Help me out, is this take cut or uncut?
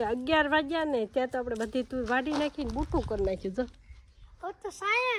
uncut